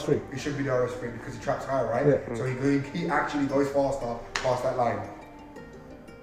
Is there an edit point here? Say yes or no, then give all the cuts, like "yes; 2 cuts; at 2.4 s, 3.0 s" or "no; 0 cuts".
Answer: no; 0 cuts